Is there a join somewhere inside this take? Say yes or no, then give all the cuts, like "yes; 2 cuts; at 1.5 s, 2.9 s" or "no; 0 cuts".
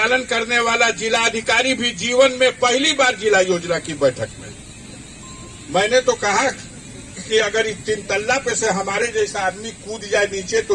no; 0 cuts